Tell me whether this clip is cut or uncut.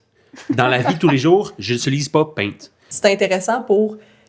cut